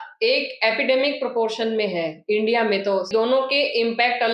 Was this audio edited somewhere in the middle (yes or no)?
yes